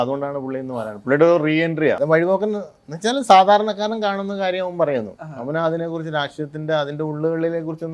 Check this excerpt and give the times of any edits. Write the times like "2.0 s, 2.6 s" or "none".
2.0 s